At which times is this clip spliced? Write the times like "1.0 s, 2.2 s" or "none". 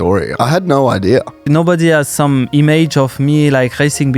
1.4 s